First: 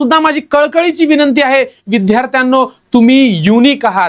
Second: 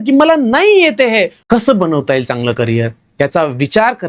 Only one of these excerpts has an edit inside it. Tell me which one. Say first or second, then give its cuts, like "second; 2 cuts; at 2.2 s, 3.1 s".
second; 1 cut; at 1.4 s